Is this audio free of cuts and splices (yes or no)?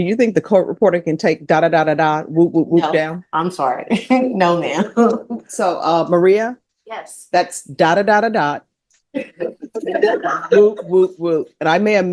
yes